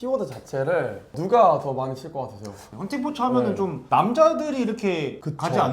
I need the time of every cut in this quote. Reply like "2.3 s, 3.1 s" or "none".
1.1 s, 2.6 s, 3.8 s